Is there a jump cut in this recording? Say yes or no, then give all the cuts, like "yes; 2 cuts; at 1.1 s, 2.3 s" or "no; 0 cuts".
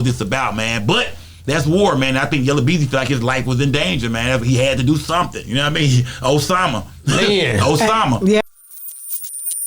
yes; 1 cut; at 8.4 s